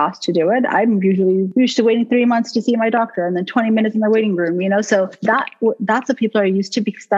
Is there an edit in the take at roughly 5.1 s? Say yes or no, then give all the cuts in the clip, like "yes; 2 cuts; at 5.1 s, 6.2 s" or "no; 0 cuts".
yes; 2 cuts; at 1.5 s, 5.1 s